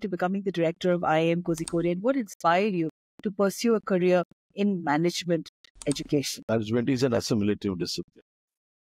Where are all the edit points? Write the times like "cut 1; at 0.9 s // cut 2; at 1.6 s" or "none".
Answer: cut 1; at 6.4 s